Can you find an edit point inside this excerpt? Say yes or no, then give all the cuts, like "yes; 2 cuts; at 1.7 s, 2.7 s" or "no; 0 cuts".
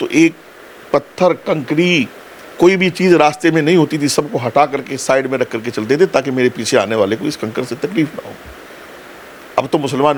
no; 0 cuts